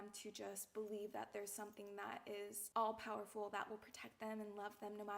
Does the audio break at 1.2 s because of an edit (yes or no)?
no